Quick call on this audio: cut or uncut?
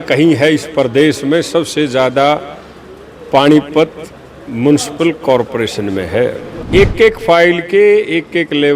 cut